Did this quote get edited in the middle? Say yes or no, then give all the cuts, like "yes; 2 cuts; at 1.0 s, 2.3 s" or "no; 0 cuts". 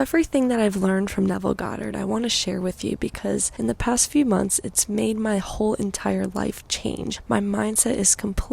yes; 2 cuts; at 3.5 s, 7.1 s